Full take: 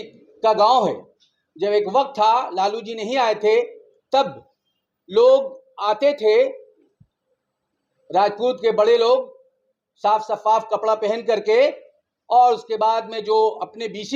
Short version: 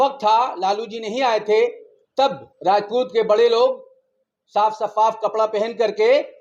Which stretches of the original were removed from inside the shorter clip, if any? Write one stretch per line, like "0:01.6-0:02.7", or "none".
0:04.4-0:08.0